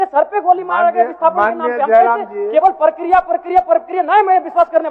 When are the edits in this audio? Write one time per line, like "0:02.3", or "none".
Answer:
none